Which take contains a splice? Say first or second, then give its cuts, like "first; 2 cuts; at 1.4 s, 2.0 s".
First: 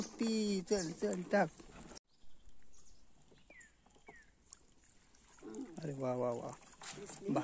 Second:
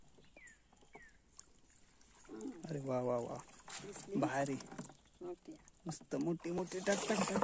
first; 1 cut; at 2.0 s